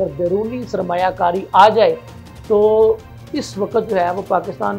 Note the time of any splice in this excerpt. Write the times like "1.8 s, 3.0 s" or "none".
none

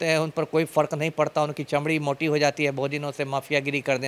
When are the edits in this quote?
none

